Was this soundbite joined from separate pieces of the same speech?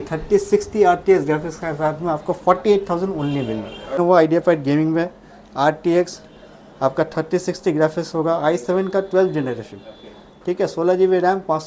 yes; 1 cut; at 4.0 s

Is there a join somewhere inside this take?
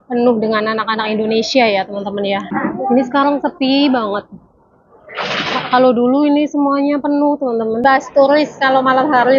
yes; 2 cuts; at 2.5 s, 7.8 s

